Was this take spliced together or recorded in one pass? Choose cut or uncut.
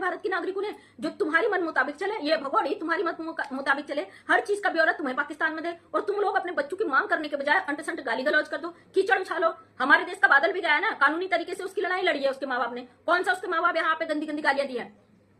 uncut